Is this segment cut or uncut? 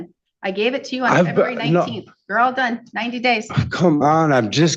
uncut